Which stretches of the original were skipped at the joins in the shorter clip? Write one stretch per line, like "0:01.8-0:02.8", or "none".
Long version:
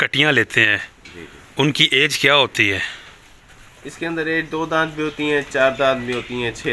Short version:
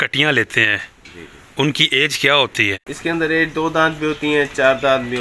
0:02.8-0:03.8